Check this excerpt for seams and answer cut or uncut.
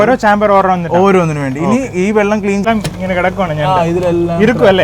cut